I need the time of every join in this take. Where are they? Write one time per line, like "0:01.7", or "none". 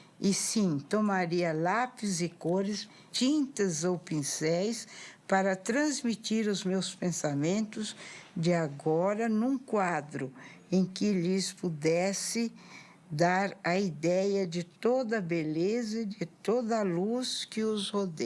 0:03.0